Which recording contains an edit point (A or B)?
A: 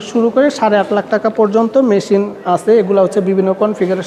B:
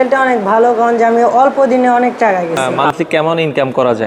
B